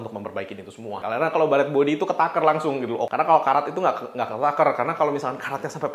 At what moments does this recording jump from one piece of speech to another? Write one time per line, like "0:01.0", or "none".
0:01.0
0:03.1